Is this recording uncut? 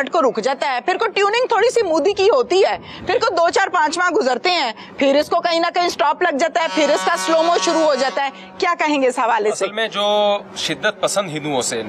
yes; 0 cuts

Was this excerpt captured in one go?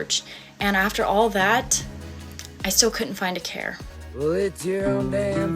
no; 1 cut; at 3.9 s

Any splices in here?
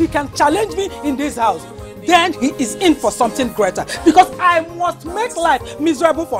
no; 0 cuts

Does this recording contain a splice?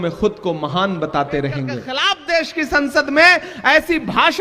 yes; 1 cut; at 1.8 s

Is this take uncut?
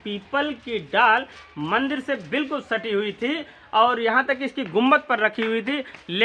yes; 0 cuts

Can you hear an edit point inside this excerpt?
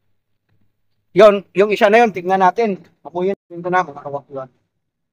yes; 1 cut; at 3.4 s

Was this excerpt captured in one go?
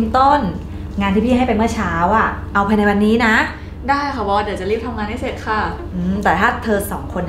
yes; 0 cuts

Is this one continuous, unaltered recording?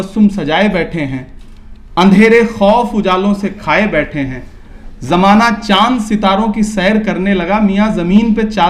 yes; 0 cuts

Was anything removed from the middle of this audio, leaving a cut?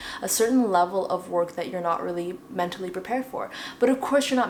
no; 0 cuts

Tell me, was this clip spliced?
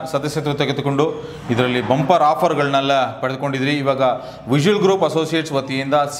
no; 0 cuts

